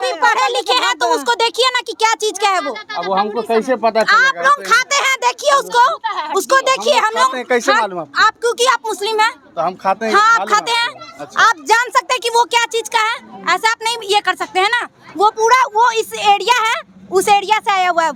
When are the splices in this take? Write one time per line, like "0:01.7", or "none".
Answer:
none